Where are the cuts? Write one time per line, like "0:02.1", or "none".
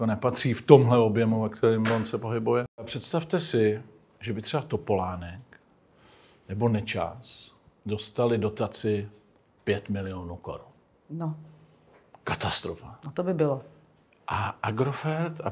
0:03.0